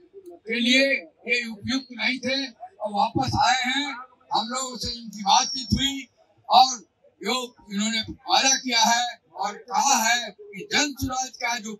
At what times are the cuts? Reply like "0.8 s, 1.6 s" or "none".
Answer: none